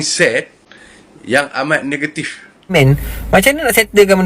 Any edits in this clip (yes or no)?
yes